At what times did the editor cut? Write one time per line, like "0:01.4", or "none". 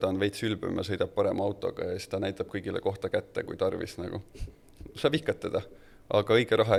none